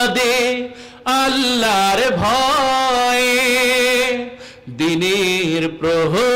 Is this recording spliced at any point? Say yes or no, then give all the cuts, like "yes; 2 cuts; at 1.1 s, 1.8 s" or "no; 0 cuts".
no; 0 cuts